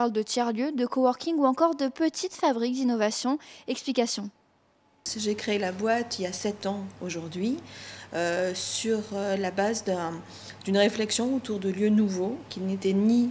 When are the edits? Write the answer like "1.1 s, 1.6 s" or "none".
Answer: 9.8 s